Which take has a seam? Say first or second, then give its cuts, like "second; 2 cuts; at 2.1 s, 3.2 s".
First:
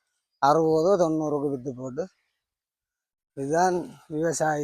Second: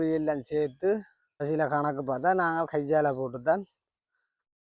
second; 1 cut; at 1.4 s